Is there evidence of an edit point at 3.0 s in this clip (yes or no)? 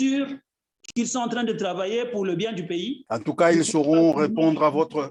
no